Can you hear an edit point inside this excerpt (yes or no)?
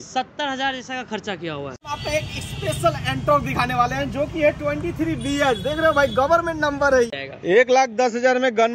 yes